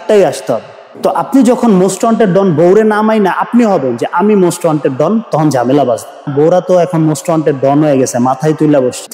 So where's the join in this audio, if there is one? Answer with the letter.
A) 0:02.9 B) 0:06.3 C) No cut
B